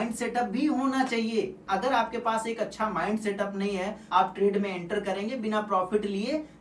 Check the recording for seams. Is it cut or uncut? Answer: cut